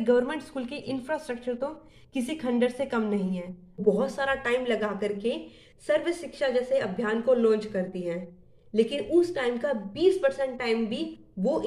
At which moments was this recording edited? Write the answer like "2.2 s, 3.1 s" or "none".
3.8 s